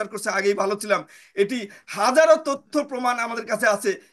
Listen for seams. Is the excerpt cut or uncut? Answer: uncut